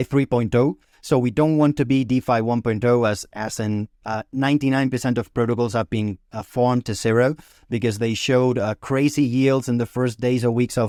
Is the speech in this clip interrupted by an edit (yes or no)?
no